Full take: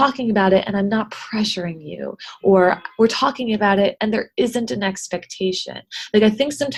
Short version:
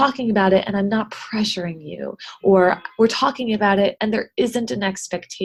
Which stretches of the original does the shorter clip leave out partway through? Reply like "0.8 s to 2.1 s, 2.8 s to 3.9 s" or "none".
none